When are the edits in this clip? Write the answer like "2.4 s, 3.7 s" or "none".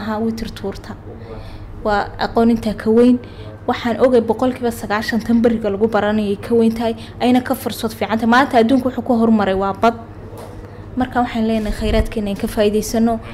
none